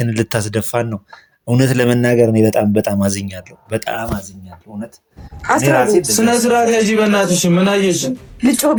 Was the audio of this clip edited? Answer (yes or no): no